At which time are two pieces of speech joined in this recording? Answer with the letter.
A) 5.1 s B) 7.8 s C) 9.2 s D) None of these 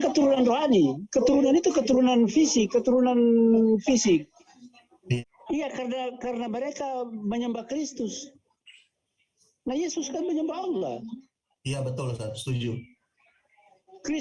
A